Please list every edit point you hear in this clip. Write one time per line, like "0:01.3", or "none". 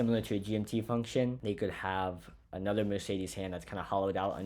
0:01.4